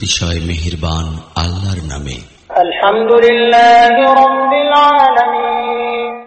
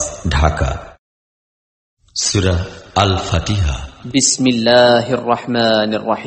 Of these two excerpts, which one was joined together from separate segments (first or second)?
first